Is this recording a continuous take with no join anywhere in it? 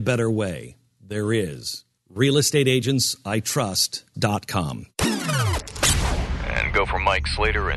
no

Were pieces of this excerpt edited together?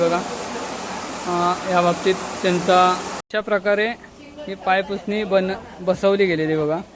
yes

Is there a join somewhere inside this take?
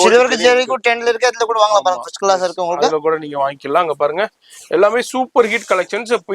no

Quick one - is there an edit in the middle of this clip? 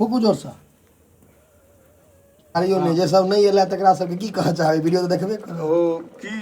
yes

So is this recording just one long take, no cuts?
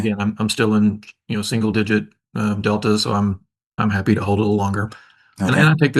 no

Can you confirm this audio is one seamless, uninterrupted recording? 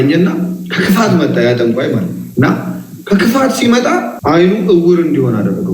no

